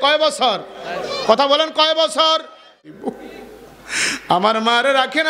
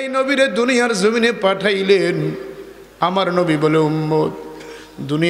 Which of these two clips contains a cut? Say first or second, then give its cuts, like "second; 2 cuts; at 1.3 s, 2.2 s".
first; 1 cut; at 2.9 s